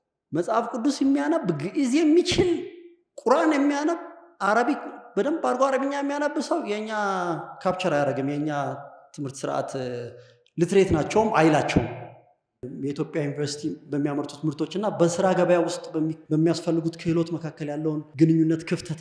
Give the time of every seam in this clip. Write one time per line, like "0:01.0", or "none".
0:12.7
0:16.2
0:18.1